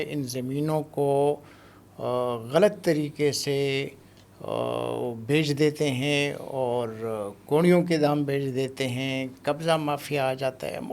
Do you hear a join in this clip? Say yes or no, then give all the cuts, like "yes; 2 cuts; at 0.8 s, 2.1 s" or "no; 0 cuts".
no; 0 cuts